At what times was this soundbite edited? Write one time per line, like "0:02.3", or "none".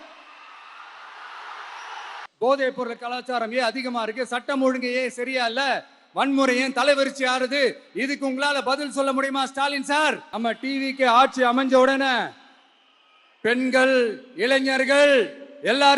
0:02.2
0:10.3